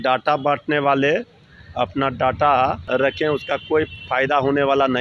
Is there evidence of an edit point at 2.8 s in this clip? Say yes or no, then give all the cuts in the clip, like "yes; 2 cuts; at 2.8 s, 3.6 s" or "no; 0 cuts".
yes; 1 cut; at 2.8 s